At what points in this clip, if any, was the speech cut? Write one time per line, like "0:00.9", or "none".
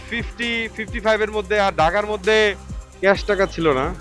0:02.9